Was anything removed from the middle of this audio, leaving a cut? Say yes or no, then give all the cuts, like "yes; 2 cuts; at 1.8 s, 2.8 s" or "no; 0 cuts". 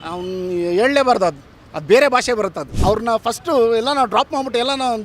yes; 1 cut; at 2.7 s